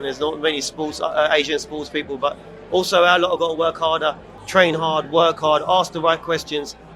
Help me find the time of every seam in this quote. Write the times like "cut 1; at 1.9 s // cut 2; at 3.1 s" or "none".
cut 1; at 4.3 s

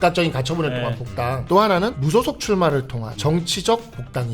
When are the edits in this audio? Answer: cut 1; at 1.4 s // cut 2; at 2.0 s // cut 3; at 3.0 s

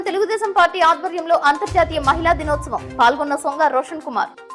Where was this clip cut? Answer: none

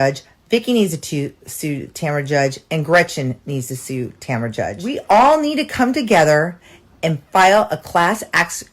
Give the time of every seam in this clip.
cut 1; at 4.8 s

